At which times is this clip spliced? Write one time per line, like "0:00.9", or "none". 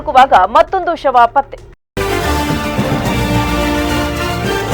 0:01.6